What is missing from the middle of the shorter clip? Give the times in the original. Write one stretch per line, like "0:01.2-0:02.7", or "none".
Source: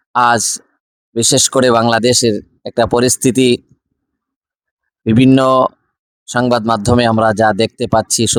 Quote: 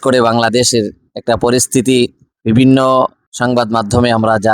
0:03.8-0:04.9
0:05.9-0:06.2